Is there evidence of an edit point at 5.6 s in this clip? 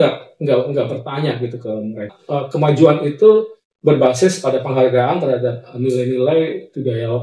no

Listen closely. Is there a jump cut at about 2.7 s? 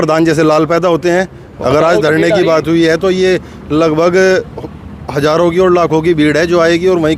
no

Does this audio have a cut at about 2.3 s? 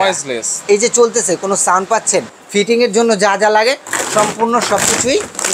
yes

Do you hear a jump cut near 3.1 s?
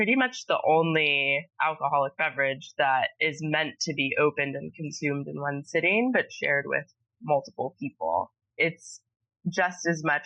no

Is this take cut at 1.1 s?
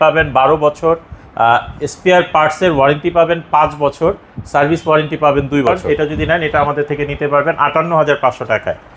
no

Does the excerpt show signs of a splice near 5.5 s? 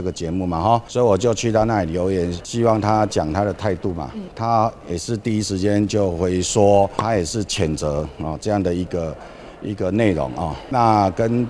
no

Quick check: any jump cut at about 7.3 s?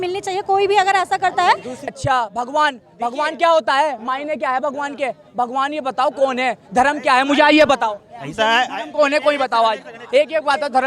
no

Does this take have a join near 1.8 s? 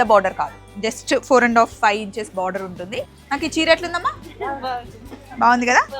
no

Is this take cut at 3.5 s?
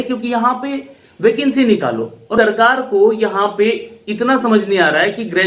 no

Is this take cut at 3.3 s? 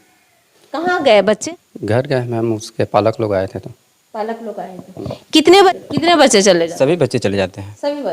no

